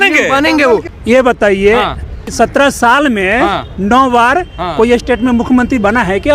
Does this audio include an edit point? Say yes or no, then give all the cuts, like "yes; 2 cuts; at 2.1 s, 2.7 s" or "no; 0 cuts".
yes; 2 cuts; at 0.9 s, 2.3 s